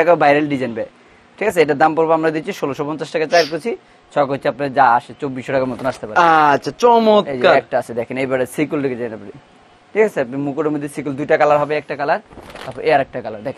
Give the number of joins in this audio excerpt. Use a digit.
0